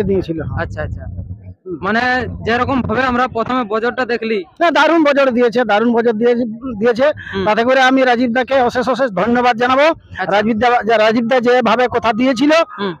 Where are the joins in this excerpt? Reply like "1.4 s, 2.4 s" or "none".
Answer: none